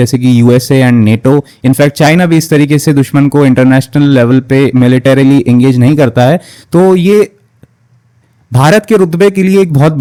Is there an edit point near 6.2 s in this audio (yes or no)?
no